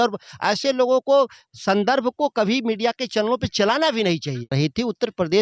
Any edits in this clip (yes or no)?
yes